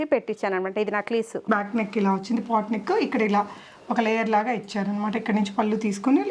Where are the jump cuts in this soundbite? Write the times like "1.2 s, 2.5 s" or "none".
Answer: 1.5 s

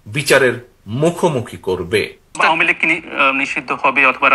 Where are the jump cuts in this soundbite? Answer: 2.3 s

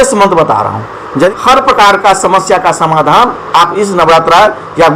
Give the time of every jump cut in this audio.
1.3 s

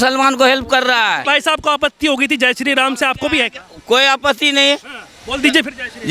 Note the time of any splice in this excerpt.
1.3 s

